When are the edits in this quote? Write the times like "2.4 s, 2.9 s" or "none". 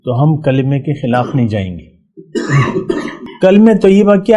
3.2 s